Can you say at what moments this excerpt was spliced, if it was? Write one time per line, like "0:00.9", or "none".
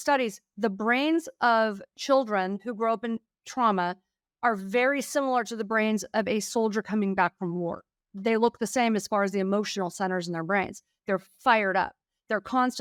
none